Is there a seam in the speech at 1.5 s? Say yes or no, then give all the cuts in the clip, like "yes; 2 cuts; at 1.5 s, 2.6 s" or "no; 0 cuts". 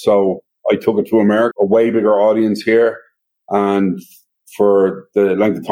yes; 1 cut; at 1.5 s